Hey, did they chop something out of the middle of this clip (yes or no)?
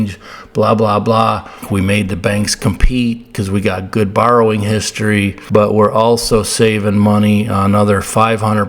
yes